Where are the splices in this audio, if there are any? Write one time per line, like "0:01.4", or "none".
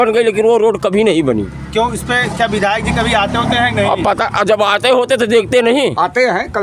none